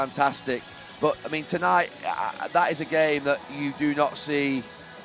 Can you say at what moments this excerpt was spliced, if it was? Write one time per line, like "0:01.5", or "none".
none